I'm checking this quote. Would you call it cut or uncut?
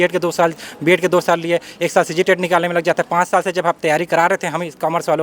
uncut